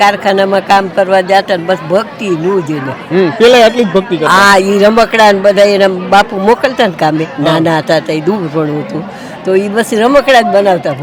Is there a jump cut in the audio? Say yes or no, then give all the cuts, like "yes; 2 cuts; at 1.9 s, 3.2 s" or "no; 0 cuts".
no; 0 cuts